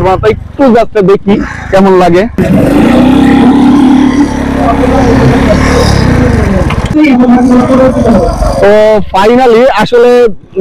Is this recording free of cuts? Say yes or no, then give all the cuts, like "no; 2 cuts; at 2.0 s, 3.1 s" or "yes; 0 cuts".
no; 2 cuts; at 2.4 s, 6.9 s